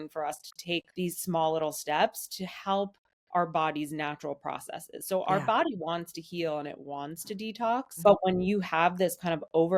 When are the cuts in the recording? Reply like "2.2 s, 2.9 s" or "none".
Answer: 0.9 s, 8.0 s